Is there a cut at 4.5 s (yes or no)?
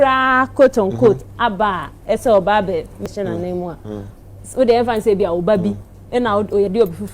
no